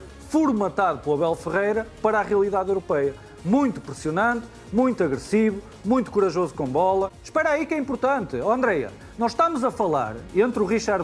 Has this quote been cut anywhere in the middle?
yes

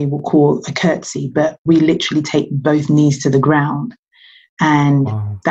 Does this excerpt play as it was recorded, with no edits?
yes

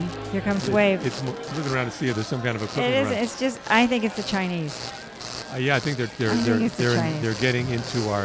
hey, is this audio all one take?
no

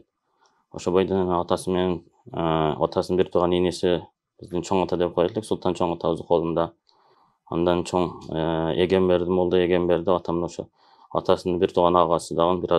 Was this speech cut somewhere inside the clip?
no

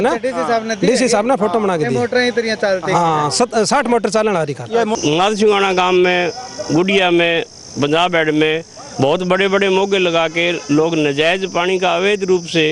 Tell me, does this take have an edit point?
yes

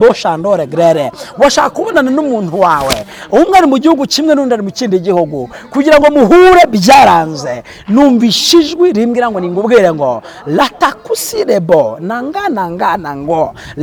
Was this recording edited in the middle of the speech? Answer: no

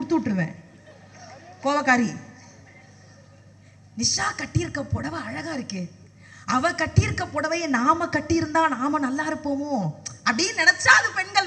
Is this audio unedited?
yes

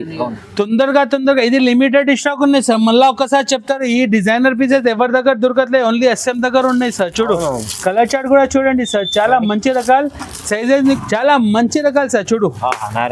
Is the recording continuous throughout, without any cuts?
no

